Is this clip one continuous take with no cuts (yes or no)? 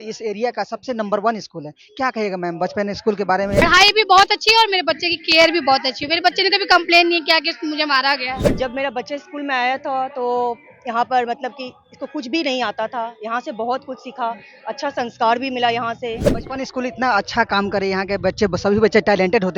no